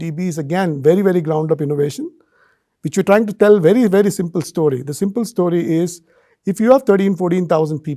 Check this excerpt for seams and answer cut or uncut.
uncut